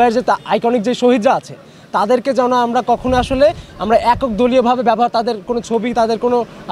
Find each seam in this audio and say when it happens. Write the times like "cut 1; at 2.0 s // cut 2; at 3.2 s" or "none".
none